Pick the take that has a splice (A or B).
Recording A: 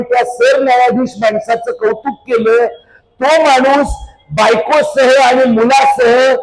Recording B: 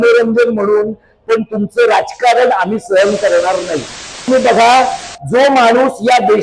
B